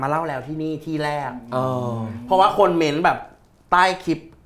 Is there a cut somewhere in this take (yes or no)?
no